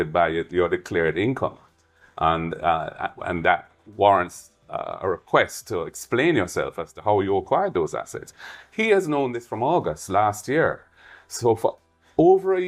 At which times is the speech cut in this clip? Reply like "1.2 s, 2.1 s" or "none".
none